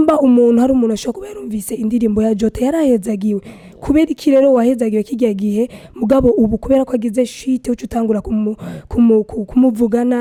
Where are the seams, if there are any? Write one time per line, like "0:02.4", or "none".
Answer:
none